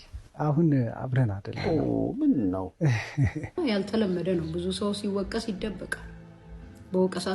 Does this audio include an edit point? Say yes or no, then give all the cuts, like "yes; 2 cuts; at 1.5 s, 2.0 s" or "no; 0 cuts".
yes; 1 cut; at 3.6 s